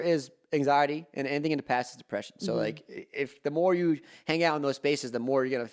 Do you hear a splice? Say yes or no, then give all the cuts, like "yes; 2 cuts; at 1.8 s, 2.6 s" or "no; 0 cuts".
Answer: no; 0 cuts